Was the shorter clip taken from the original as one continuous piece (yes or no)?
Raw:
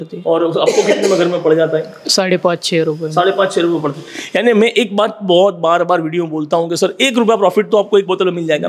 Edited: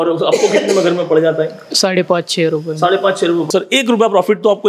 no